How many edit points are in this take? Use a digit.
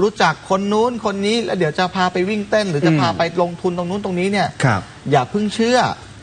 0